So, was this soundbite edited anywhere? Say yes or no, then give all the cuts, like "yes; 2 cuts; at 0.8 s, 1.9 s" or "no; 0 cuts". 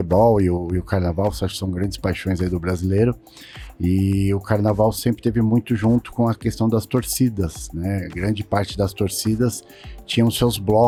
no; 0 cuts